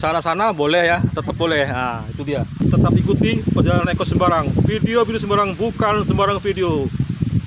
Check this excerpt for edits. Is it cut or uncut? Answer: cut